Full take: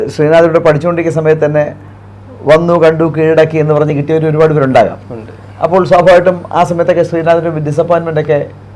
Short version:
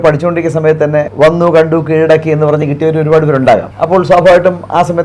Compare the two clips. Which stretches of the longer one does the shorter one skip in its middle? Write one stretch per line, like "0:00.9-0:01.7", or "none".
0:01.7-0:02.4
0:05.0-0:05.5